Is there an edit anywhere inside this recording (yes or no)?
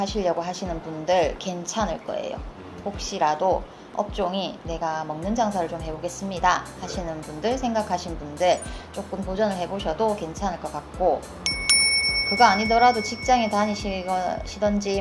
no